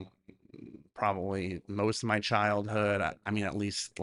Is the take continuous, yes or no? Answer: yes